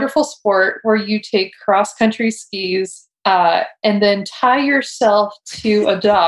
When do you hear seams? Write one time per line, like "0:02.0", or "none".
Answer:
none